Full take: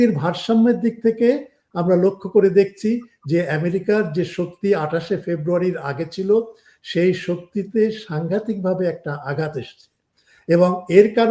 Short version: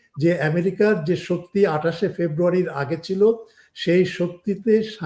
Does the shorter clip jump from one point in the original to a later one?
no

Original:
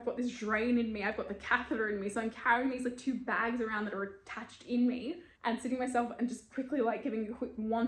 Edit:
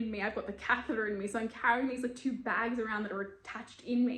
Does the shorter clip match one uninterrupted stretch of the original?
yes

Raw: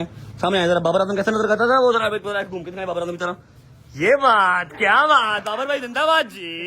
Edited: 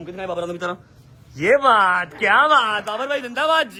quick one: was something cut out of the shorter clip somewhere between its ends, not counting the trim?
no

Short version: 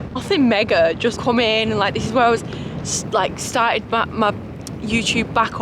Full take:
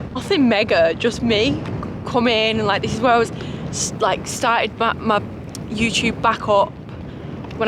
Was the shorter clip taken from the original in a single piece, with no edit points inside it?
no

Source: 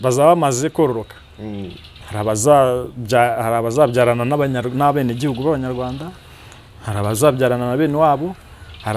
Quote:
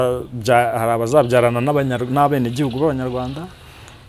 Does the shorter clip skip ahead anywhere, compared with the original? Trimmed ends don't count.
no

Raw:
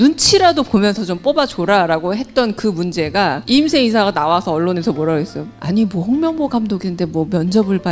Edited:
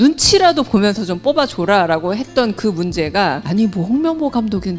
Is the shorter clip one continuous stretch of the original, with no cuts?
no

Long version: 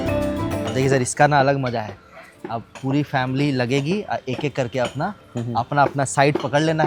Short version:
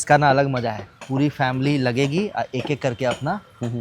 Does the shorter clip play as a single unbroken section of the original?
no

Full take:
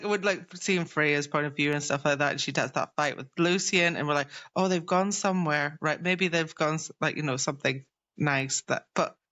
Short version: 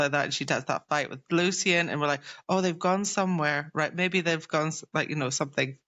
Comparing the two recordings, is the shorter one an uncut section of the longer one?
yes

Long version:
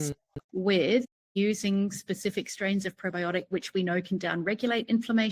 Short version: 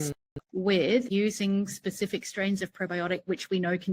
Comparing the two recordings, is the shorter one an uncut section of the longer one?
no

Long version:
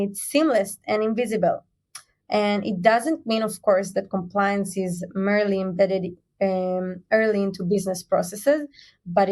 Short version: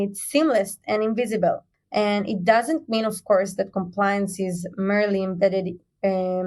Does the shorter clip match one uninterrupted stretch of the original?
no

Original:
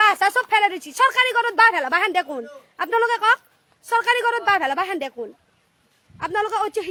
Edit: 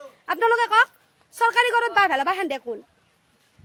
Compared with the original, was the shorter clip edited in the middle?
no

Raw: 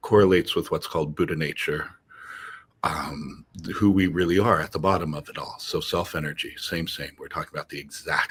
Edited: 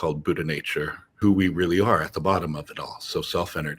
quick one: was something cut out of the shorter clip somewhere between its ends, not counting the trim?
yes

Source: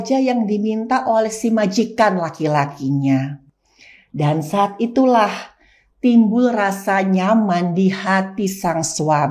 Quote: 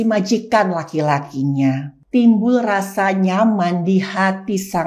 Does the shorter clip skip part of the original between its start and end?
yes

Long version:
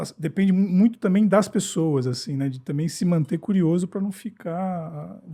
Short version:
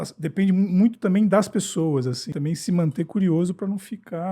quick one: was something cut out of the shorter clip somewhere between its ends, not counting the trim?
yes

